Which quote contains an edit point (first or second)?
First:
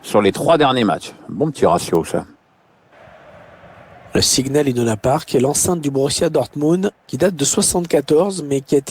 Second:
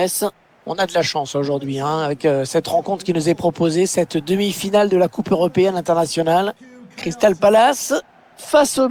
first